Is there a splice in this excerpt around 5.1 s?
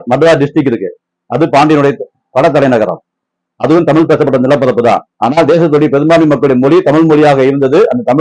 yes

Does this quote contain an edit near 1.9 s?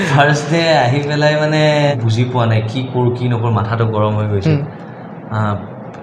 yes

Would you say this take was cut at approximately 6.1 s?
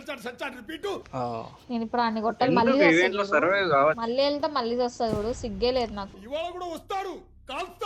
yes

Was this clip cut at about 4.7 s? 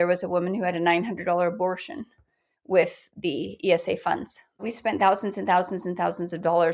yes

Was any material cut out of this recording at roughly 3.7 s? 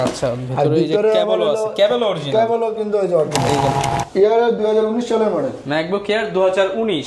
yes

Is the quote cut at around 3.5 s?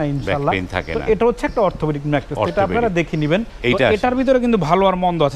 yes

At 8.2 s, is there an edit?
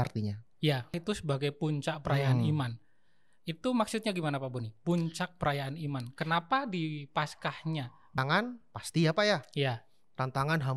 yes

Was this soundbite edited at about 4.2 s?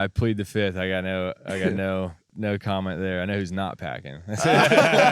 no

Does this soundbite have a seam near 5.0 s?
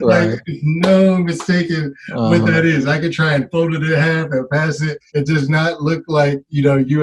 yes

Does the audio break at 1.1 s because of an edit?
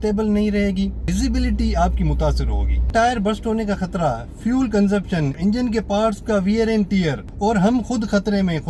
yes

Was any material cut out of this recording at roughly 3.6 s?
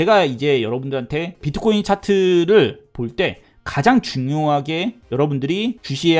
no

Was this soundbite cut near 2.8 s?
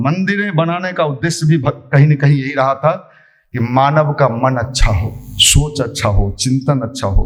no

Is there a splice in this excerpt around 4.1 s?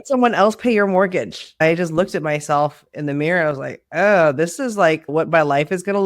no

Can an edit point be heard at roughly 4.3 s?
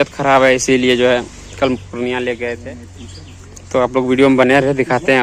no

